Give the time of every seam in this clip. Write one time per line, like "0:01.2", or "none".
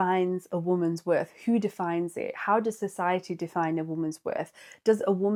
none